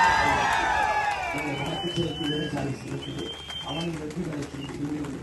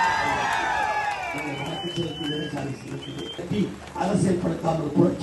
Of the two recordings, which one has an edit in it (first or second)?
second